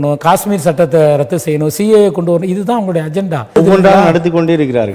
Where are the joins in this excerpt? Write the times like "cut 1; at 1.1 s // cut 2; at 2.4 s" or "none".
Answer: cut 1; at 3.6 s

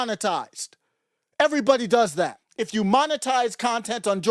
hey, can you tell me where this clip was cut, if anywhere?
cut 1; at 2.4 s

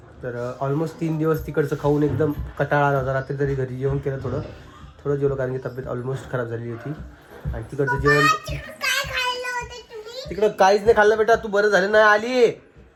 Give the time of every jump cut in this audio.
none

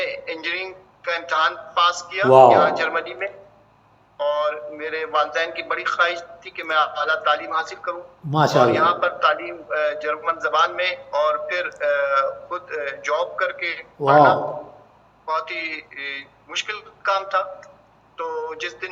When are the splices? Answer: none

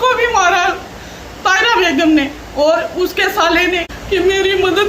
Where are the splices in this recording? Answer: cut 1; at 3.9 s

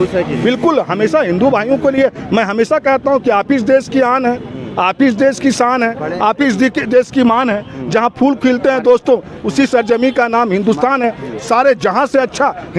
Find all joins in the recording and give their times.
none

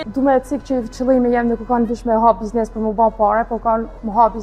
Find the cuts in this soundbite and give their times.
none

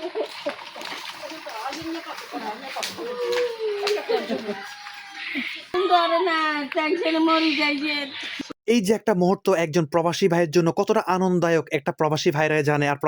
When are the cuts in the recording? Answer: cut 1; at 5.7 s // cut 2; at 8.2 s

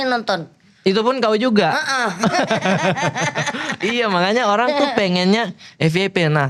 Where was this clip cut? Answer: none

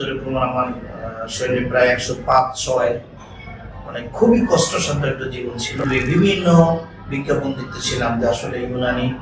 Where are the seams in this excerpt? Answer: cut 1; at 5.8 s

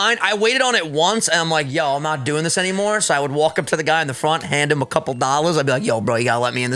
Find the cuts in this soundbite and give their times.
none

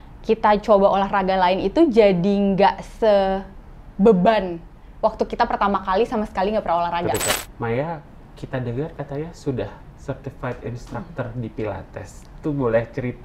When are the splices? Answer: cut 1; at 7.3 s

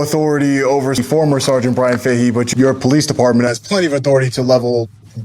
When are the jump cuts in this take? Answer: cut 1; at 1.0 s // cut 2; at 2.5 s

